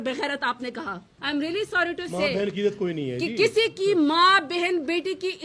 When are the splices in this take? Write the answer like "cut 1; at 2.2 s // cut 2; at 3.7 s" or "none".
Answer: cut 1; at 1.1 s